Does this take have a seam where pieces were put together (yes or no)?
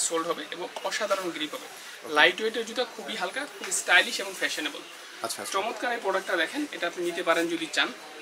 no